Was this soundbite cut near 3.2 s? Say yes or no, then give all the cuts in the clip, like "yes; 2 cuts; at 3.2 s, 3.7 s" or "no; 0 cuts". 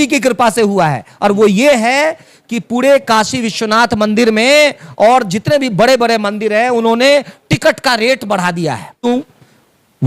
no; 1 cut; at 9.0 s